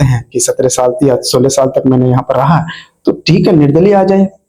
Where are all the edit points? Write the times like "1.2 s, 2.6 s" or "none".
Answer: none